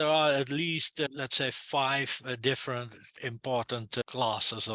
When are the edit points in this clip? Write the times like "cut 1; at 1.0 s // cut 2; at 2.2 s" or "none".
cut 1; at 1.1 s // cut 2; at 3.1 s // cut 3; at 4.0 s